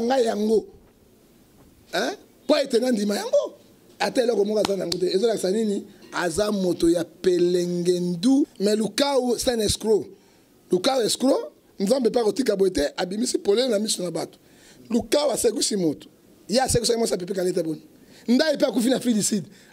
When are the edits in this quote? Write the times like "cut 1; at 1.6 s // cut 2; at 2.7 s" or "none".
cut 1; at 8.5 s